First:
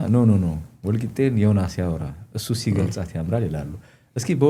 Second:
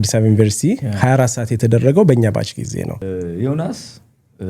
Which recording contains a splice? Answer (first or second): second